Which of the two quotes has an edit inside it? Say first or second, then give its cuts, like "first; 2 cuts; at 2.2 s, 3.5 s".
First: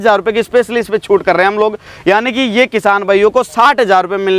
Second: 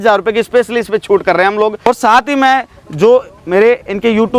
second; 1 cut; at 1.9 s